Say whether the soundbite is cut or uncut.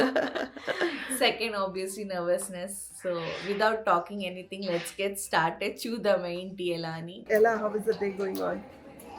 cut